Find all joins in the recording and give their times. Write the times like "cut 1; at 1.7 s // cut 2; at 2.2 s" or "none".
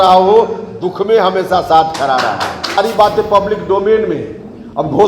cut 1; at 2.8 s